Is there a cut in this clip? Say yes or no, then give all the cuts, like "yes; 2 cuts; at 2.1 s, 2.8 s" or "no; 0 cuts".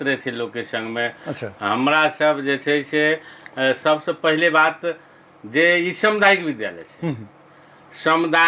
no; 0 cuts